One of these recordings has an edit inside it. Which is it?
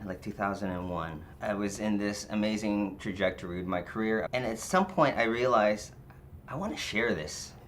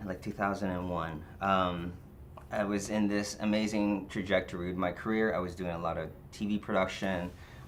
first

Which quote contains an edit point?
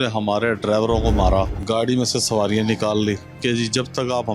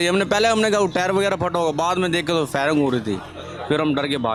first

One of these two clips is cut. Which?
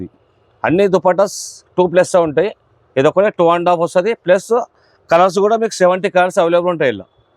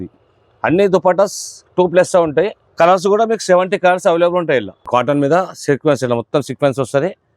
second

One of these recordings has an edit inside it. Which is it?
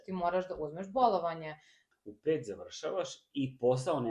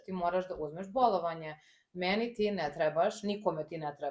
first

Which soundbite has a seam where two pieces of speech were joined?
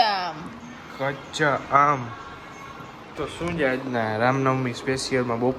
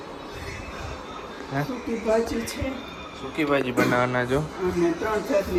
first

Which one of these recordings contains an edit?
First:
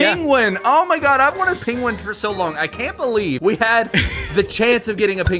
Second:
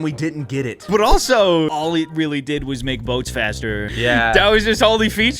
second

